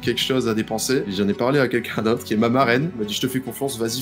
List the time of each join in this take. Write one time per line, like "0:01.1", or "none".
0:01.1
0:02.2
0:03.1